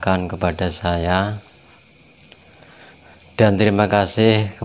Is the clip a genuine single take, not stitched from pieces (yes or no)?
yes